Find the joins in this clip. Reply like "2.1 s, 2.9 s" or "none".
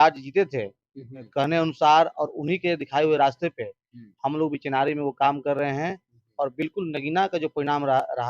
1.2 s